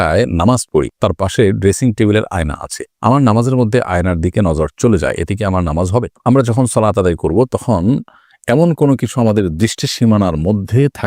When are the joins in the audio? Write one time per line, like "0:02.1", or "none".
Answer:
none